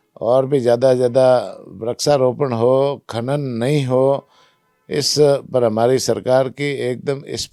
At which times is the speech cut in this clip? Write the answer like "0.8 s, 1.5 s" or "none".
none